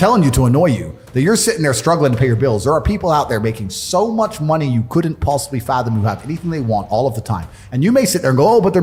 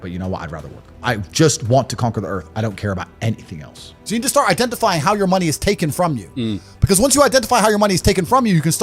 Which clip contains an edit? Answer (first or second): second